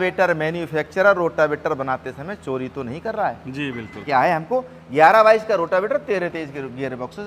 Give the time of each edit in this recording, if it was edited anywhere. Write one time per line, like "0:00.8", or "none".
0:04.0